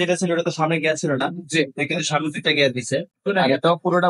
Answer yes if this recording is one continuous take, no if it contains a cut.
yes